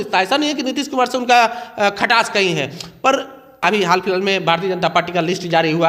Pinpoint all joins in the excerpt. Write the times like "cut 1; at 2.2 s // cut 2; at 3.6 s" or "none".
cut 1; at 3.6 s